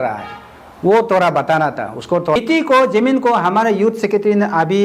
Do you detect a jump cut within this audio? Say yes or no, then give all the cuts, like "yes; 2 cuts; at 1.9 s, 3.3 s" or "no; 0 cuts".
yes; 1 cut; at 2.4 s